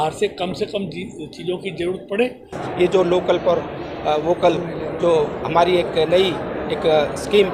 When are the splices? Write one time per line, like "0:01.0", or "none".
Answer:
0:02.6